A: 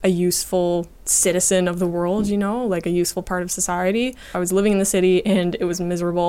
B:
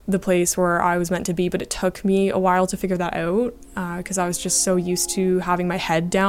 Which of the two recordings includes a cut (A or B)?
A